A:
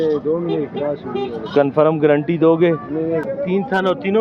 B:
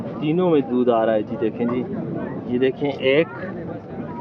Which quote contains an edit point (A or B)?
A